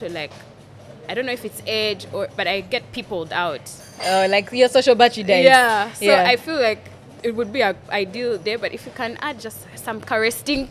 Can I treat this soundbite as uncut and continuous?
yes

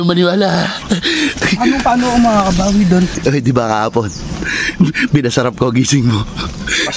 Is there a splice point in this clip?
yes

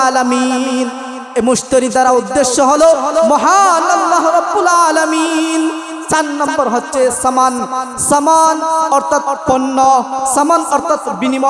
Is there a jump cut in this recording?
no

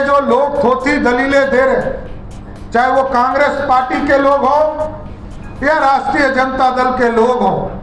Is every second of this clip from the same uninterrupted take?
yes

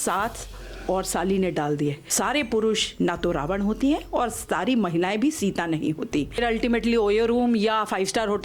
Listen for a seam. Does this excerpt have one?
yes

